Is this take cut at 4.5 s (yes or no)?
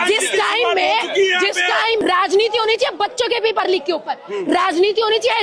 no